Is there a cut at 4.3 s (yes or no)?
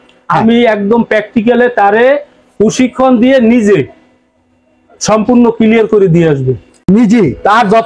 no